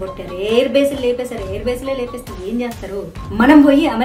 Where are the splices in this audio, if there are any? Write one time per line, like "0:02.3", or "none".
0:03.1